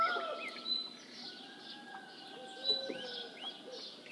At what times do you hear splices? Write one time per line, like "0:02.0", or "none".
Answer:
none